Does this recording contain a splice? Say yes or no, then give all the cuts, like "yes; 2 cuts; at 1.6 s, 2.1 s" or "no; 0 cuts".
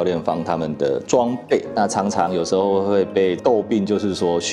yes; 2 cuts; at 1.7 s, 3.4 s